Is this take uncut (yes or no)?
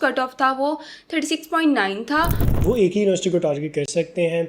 no